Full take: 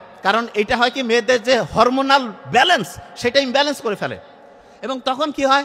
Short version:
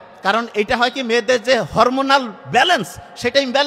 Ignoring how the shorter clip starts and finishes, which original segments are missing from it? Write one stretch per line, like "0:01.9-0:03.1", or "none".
none